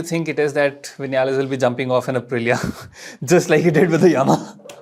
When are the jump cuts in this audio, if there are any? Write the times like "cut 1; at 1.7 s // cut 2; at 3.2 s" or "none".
none